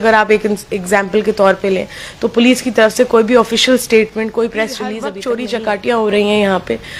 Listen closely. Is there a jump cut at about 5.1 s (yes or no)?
yes